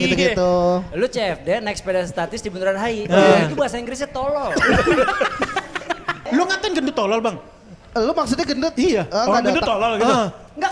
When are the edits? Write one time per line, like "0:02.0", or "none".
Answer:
0:06.3